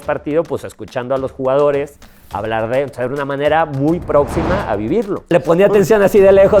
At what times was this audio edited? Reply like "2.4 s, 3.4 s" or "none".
5.2 s